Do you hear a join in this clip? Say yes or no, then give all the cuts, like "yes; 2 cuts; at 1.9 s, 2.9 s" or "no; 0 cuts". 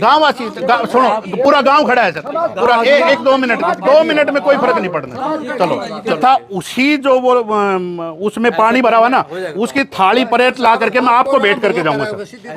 yes; 1 cut; at 6.2 s